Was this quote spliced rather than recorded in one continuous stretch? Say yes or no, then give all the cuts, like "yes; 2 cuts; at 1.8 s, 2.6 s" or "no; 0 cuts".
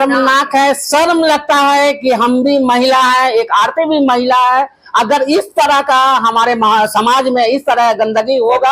no; 0 cuts